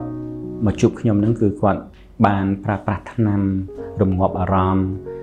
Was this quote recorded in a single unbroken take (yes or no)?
yes